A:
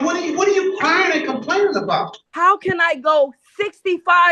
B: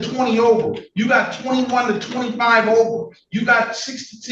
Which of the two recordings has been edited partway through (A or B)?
A